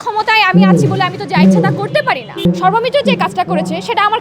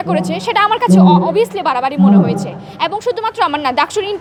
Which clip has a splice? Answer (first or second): first